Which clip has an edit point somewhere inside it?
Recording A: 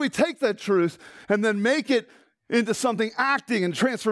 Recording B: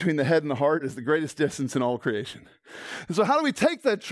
B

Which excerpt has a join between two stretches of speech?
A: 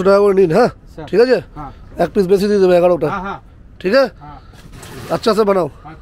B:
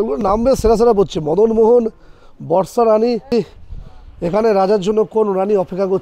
B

